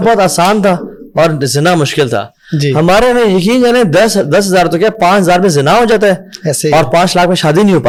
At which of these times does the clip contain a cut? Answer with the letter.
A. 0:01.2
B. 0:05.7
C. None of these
C